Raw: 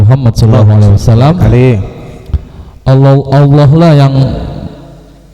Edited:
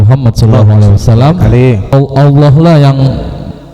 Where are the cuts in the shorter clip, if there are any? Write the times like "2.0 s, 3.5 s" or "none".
1.9 s